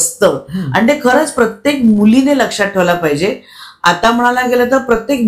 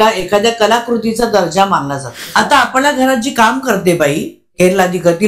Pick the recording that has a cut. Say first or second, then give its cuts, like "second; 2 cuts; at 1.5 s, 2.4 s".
second; 1 cut; at 2.3 s